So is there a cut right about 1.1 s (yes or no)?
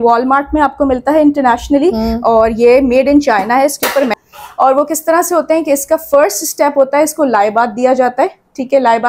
no